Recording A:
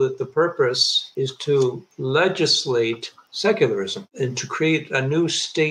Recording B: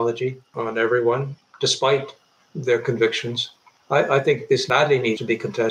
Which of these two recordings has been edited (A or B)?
B